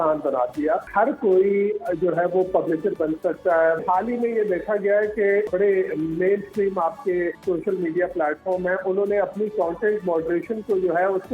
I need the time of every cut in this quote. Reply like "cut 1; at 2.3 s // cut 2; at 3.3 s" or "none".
cut 1; at 0.9 s // cut 2; at 3.8 s // cut 3; at 5.5 s // cut 4; at 7.4 s